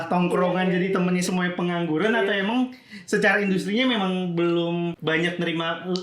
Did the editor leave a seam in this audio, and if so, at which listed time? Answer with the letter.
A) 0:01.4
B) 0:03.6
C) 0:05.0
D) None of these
C